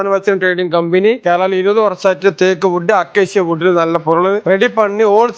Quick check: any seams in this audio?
yes; 1 cut; at 1.2 s

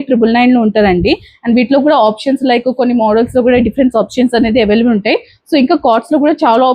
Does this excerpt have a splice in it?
no; 0 cuts

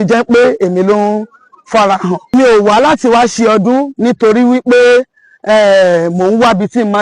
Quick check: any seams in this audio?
yes; 1 cut; at 2.2 s

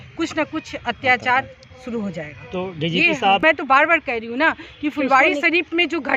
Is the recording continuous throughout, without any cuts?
no; 1 cut; at 3.4 s

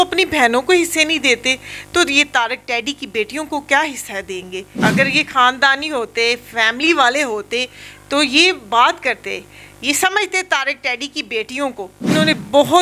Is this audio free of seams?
no; 2 cuts; at 4.8 s, 12.0 s

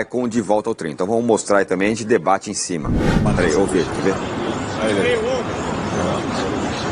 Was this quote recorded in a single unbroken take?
no; 1 cut; at 3.2 s

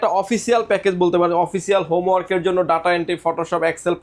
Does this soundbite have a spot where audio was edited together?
no; 0 cuts

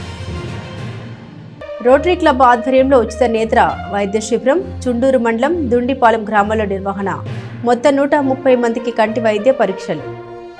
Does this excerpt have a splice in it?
yes; 1 cut; at 1.4 s

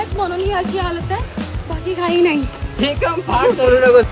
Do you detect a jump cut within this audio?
no; 0 cuts

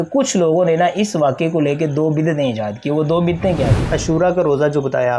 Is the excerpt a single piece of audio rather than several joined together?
no; 1 cut; at 3.9 s

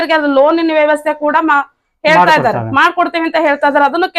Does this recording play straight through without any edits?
yes; 0 cuts

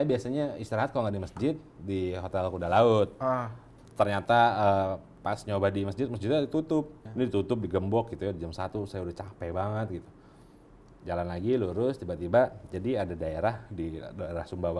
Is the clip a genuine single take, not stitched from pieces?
no; 2 cuts; at 3.8 s, 7.0 s

